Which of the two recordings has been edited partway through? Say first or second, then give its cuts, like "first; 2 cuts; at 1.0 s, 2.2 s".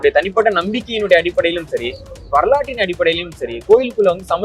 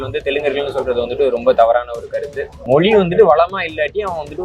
second; 1 cut; at 2.5 s